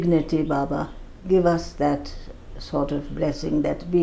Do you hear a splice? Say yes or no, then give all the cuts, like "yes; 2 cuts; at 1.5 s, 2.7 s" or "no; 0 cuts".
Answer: no; 0 cuts